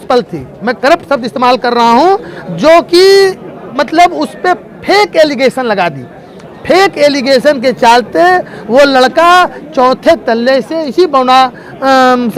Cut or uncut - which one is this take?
uncut